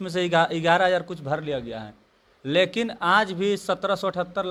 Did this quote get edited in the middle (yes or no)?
no